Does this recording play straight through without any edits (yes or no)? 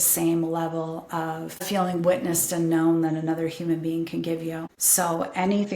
no